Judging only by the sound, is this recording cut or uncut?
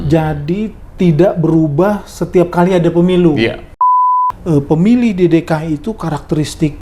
cut